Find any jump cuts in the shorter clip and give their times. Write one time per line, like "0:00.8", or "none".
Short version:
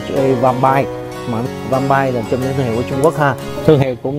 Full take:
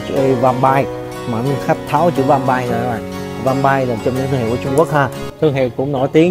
0:01.4